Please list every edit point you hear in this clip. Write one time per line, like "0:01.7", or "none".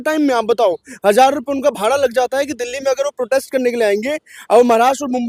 none